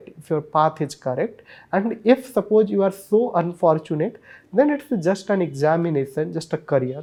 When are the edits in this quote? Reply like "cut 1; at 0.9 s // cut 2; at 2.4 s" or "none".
none